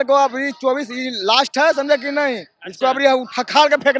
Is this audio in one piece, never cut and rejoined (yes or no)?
yes